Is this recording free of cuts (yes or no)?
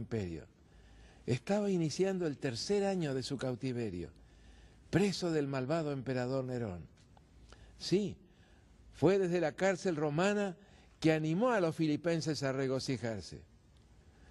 no